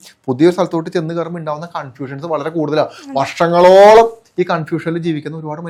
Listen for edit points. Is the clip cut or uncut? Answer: uncut